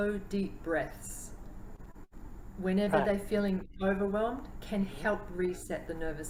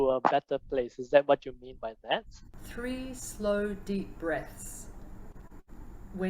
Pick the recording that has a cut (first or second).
second